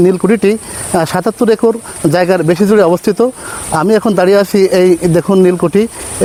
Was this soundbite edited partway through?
no; 0 cuts

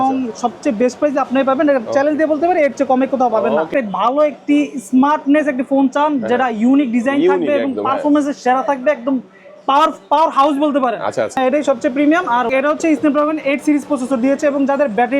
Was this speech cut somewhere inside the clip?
yes; 3 cuts; at 3.7 s, 11.4 s, 12.5 s

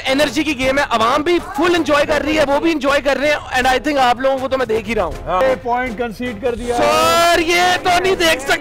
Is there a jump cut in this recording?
yes; 1 cut; at 5.4 s

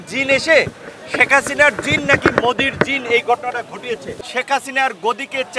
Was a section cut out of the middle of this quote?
yes; 1 cut; at 4.1 s

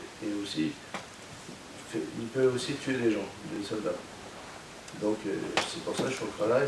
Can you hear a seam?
no; 0 cuts

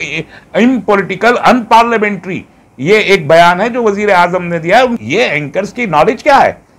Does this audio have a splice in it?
yes; 1 cut; at 5.0 s

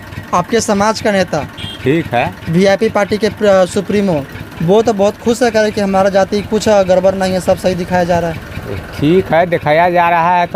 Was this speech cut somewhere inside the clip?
no; 0 cuts

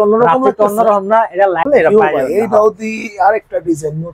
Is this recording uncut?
no; 1 cut; at 1.7 s

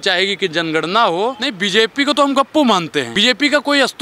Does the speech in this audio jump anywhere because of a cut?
yes; 2 cuts; at 1.5 s, 3.1 s

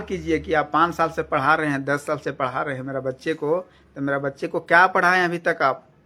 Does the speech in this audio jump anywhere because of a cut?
no; 0 cuts

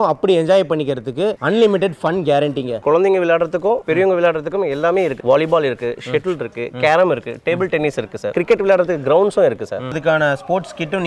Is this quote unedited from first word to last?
no; 4 cuts; at 2.8 s, 5.2 s, 8.3 s, 10.0 s

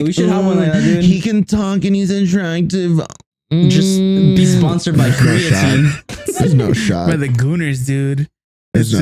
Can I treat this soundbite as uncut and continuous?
yes; 0 cuts

